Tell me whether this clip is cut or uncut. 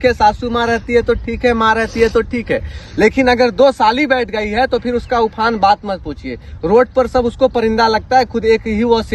uncut